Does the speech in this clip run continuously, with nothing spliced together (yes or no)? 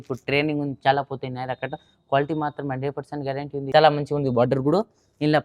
no